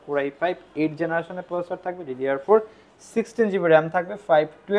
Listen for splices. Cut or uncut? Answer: uncut